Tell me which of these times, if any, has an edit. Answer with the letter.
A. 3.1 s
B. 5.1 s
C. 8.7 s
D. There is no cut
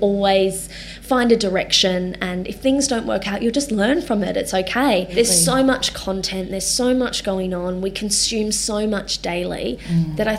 B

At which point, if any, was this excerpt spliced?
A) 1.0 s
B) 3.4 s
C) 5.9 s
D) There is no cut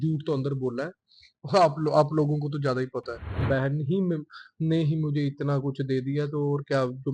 B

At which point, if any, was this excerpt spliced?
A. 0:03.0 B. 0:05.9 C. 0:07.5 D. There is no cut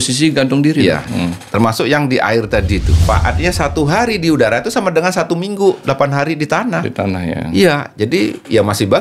A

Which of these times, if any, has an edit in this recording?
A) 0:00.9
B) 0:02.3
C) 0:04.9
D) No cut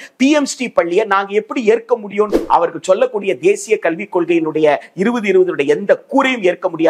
B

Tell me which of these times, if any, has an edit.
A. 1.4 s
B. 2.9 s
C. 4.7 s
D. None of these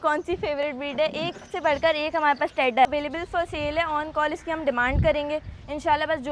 B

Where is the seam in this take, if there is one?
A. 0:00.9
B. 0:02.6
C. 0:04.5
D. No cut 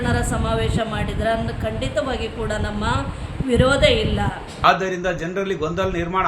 C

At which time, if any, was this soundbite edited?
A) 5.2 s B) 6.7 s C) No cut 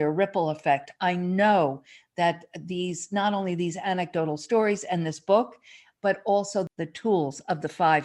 B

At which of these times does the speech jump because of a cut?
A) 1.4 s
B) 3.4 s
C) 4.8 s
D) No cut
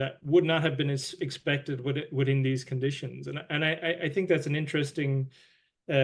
D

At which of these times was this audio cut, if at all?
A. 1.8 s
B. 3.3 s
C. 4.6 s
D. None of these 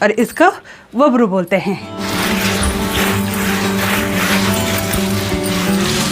D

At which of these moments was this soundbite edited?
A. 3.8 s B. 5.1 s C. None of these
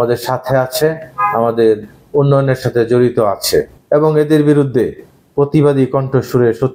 A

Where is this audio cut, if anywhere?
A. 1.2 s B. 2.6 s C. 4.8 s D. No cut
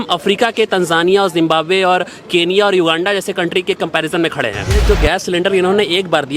C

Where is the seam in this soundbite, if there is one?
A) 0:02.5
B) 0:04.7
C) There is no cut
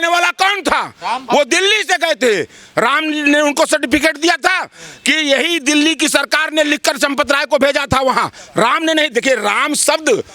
C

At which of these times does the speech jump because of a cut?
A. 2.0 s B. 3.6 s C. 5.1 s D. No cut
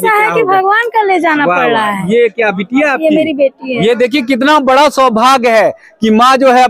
D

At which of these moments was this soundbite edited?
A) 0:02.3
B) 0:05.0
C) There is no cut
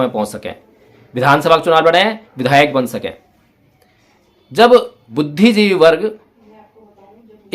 B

